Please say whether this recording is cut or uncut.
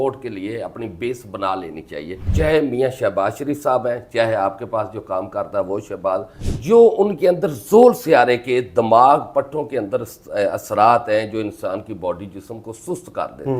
cut